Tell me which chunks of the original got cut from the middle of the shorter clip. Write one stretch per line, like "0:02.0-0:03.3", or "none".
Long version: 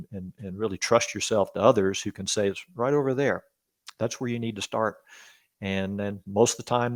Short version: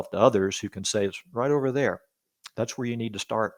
none